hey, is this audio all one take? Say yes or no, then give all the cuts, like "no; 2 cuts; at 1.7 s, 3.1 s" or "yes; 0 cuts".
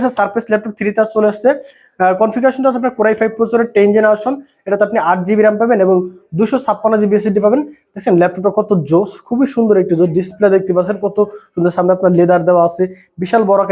yes; 0 cuts